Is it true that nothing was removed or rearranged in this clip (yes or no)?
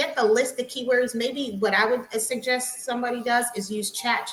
yes